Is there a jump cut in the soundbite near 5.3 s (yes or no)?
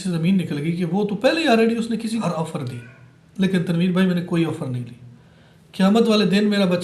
no